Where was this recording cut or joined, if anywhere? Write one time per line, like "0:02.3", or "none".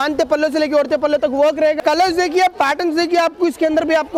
0:01.8